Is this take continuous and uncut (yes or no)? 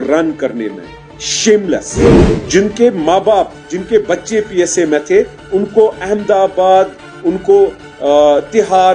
no